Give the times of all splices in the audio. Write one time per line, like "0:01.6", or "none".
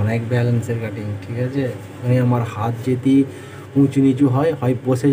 0:01.9